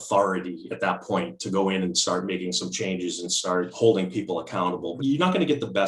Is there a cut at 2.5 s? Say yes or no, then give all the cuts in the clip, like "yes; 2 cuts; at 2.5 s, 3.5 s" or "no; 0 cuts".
no; 2 cuts; at 3.7 s, 5.0 s